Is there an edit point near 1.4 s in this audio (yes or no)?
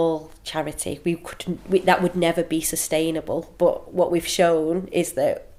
no